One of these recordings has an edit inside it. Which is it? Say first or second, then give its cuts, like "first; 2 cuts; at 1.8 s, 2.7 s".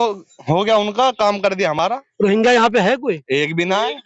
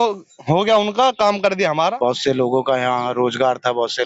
second; 1 cut; at 1.7 s